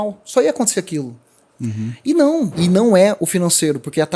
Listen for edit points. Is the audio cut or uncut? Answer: cut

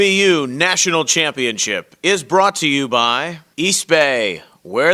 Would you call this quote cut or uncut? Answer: cut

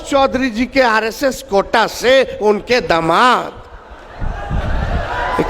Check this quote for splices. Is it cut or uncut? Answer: uncut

